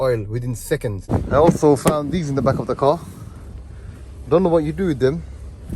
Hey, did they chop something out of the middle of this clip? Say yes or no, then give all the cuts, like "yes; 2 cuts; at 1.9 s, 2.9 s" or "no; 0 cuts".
yes; 1 cut; at 1.0 s